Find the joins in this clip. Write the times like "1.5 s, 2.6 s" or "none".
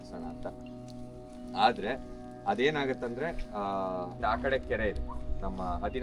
4.1 s